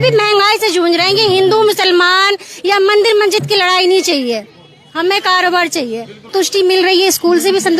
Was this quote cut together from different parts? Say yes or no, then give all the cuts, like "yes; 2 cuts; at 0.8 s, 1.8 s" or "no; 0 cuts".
yes; 1 cut; at 6.3 s